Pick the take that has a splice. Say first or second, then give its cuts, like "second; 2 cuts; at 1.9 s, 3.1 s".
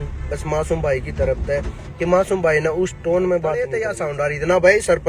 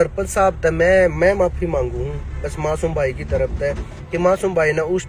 first; 1 cut; at 3.9 s